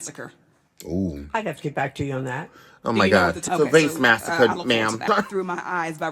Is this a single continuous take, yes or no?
no